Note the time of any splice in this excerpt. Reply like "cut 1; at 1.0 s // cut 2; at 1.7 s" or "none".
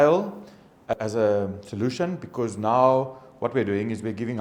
cut 1; at 0.9 s